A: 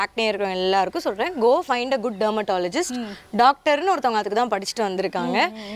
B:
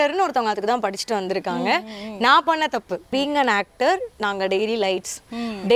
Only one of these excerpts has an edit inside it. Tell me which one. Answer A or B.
B